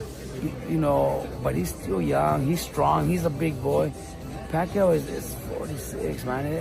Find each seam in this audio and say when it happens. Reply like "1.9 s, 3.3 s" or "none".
none